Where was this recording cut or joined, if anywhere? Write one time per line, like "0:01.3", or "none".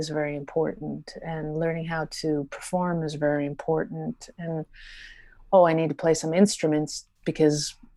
none